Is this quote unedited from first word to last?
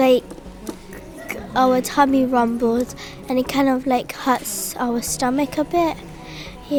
yes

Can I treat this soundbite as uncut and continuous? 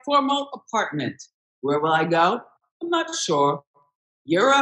no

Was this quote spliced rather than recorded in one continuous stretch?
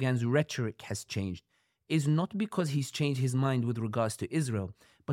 no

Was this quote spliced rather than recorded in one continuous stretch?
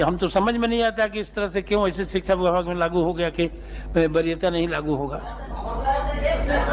no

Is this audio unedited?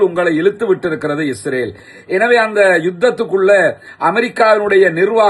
yes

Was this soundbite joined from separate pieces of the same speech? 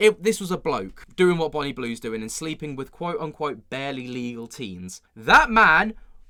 no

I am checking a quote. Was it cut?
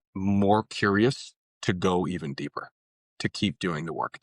no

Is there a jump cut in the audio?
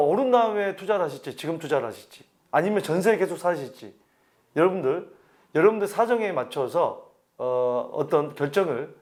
no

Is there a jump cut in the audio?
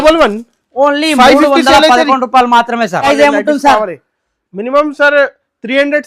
yes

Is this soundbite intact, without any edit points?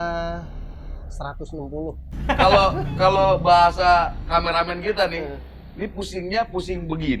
no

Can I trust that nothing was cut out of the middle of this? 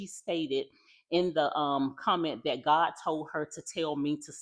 yes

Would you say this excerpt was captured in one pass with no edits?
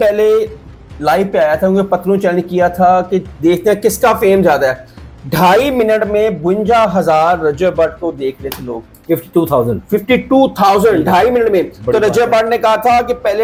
yes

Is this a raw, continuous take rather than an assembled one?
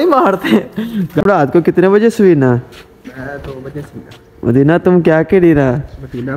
no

